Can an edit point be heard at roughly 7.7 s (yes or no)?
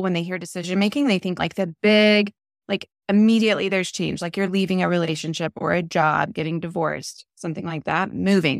no